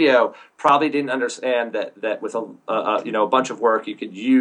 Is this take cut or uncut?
uncut